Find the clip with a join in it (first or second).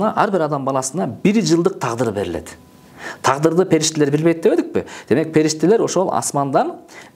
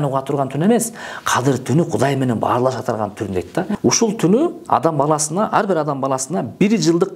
second